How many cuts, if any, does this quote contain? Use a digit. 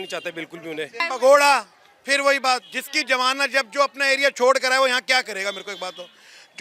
1